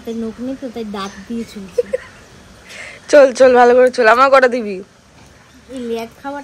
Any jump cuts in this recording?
no; 0 cuts

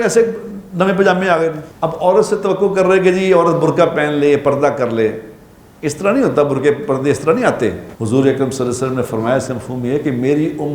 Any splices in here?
yes; 2 cuts; at 1.7 s, 7.9 s

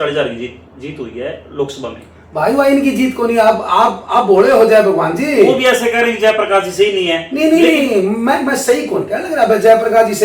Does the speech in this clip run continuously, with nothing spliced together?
yes; 0 cuts

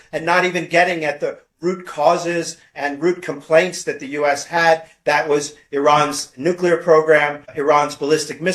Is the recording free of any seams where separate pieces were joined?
yes; 0 cuts

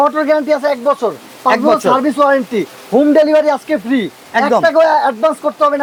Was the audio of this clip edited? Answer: no; 0 cuts

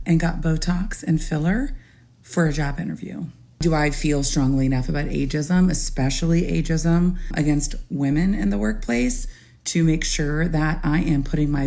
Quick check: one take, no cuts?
no; 2 cuts; at 3.6 s, 7.3 s

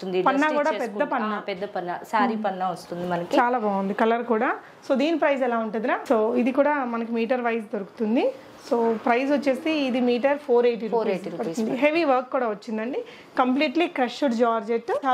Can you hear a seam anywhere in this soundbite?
no; 0 cuts

